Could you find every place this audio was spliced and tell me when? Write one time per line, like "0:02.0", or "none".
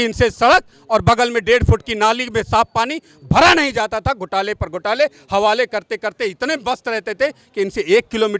none